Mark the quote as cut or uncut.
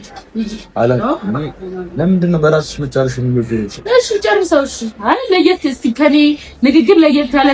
uncut